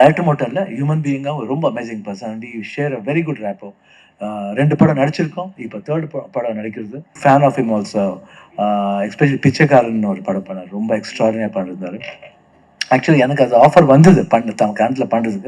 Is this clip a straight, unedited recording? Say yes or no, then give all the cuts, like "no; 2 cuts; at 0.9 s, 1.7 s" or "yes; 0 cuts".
no; 1 cut; at 7.2 s